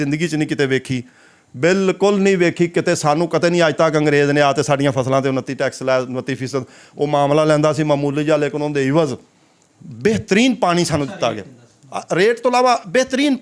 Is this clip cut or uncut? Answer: uncut